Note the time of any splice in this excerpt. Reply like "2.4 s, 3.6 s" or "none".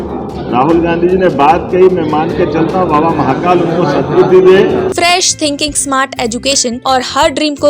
4.9 s, 6.8 s